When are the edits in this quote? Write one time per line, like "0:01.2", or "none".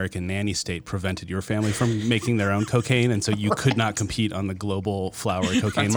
none